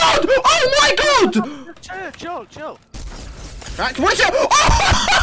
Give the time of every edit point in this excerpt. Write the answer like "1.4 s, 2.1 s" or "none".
2.8 s

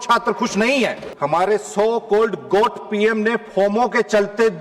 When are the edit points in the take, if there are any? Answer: 1.0 s

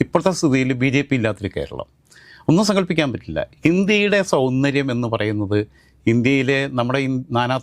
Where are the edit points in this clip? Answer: none

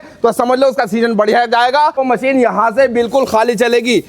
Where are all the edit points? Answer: 2.0 s

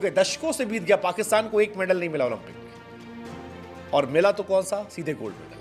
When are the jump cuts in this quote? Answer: none

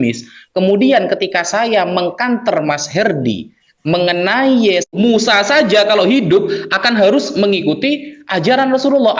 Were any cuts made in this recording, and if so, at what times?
4.9 s

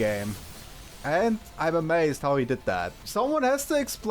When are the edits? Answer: 3.0 s

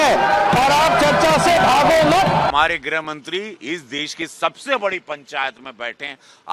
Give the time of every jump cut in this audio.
2.5 s

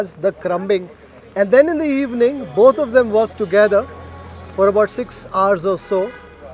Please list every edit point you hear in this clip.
none

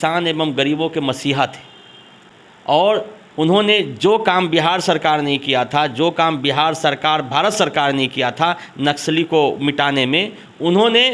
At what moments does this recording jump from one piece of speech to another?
none

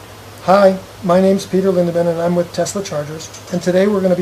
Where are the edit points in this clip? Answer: none

